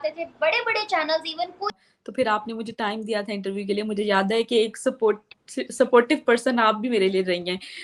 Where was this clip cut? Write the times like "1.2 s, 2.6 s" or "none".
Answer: 1.7 s